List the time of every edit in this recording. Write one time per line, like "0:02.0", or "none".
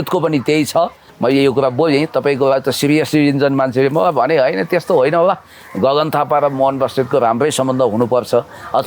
0:01.0